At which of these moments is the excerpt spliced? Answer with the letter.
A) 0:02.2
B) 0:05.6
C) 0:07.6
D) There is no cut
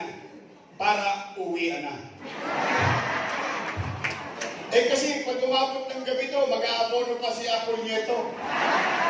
D